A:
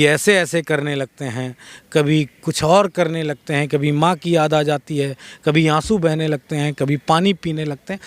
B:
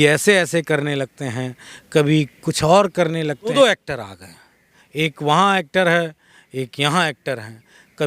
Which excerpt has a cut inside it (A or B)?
B